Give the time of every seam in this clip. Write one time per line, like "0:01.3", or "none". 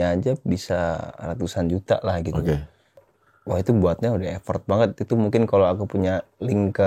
0:03.1